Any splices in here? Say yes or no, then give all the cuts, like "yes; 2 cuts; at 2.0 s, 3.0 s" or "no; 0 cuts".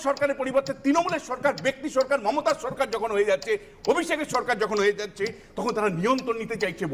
no; 0 cuts